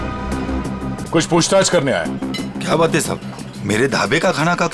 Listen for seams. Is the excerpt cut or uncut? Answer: cut